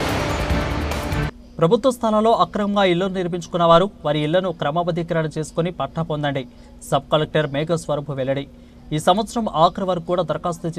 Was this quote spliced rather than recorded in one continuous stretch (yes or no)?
yes